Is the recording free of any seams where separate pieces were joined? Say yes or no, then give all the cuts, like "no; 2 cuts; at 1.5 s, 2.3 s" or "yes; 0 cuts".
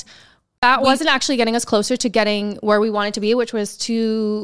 yes; 0 cuts